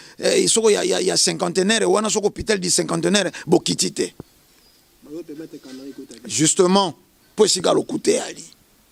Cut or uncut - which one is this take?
uncut